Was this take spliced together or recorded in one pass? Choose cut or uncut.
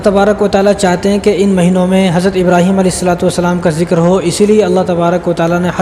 uncut